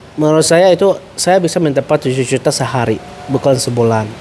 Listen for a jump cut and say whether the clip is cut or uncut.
uncut